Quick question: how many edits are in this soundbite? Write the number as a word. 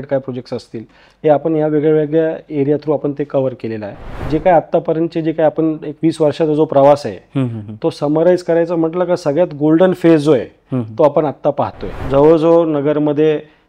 two